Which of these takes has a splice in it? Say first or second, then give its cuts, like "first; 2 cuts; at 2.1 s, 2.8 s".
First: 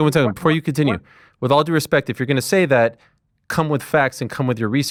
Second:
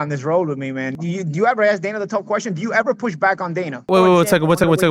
second; 2 cuts; at 1.0 s, 3.9 s